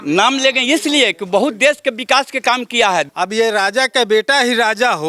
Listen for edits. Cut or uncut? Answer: cut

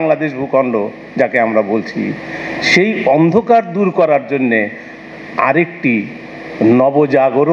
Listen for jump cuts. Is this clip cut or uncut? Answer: uncut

